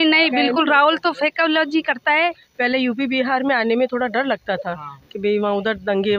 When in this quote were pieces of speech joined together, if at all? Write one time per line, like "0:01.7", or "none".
0:02.5